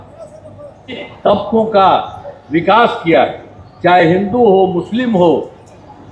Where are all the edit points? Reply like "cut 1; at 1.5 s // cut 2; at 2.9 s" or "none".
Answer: cut 1; at 1.0 s